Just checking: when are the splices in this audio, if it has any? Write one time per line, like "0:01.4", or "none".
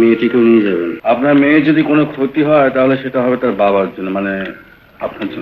0:00.9